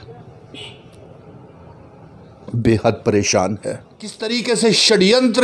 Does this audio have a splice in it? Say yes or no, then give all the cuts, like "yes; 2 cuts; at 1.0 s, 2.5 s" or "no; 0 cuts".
yes; 1 cut; at 4.2 s